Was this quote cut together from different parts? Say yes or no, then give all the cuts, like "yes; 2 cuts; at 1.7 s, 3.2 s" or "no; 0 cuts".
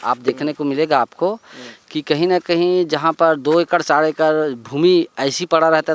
no; 0 cuts